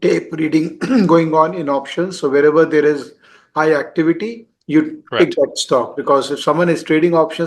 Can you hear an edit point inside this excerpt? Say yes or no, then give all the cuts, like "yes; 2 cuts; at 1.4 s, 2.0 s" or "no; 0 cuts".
no; 0 cuts